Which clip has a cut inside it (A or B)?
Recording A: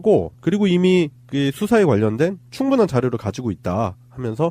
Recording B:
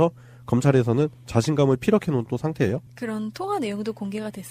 A